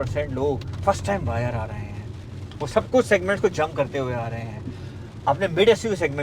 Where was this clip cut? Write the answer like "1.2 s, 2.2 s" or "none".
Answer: none